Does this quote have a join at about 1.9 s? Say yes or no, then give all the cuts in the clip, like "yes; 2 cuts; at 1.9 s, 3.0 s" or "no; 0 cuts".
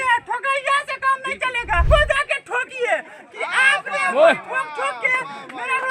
yes; 1 cut; at 1.9 s